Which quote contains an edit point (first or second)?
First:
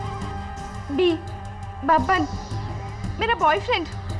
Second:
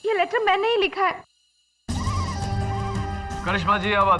second